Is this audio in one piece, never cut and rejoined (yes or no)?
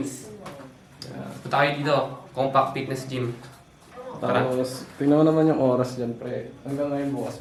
yes